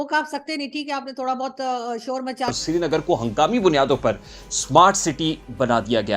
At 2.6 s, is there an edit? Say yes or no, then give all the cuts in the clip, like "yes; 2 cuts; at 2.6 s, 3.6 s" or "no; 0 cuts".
yes; 1 cut; at 2.6 s